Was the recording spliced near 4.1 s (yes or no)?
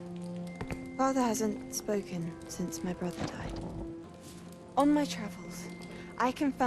yes